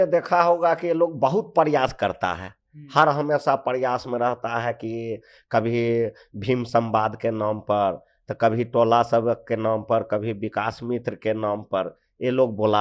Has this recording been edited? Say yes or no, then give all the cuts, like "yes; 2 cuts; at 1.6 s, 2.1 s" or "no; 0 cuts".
no; 0 cuts